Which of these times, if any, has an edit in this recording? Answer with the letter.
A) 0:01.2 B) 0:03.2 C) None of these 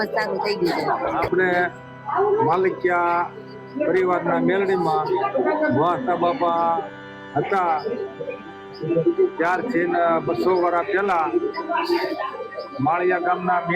A